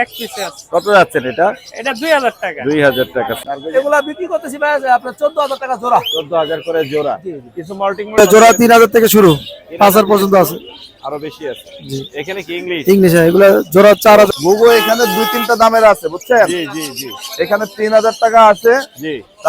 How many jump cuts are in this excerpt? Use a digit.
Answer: 3